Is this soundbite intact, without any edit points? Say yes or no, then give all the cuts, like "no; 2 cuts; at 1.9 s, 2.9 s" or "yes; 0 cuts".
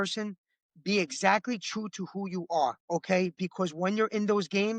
no; 1 cut; at 2.8 s